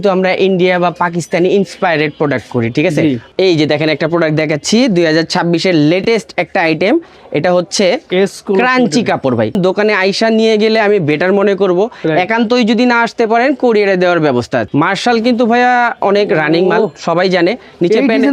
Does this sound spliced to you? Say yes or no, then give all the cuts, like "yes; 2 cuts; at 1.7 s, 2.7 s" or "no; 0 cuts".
yes; 3 cuts; at 3.3 s, 9.6 s, 14.7 s